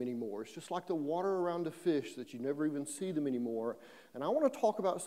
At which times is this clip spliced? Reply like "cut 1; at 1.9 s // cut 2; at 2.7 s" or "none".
cut 1; at 3.4 s